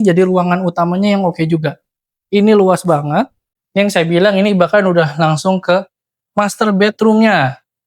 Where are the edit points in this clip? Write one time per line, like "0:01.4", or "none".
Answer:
0:03.3